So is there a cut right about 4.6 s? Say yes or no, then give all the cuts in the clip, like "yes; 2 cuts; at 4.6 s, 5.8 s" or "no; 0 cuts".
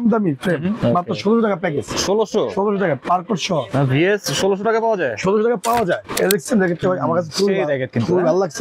no; 2 cuts; at 0.8 s, 6.1 s